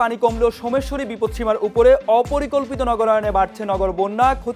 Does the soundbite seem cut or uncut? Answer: uncut